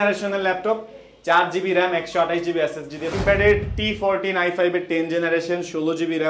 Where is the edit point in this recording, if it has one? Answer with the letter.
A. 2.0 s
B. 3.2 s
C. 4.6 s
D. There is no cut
B